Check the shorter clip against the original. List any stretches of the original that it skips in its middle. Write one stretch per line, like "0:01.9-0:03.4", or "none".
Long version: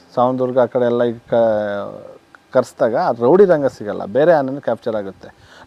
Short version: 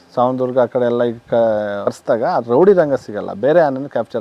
0:01.9-0:02.6